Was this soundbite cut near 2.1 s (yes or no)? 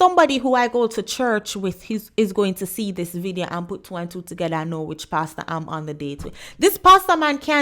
no